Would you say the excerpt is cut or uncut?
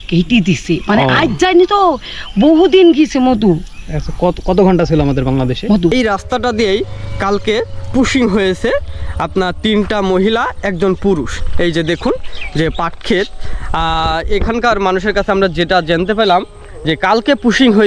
cut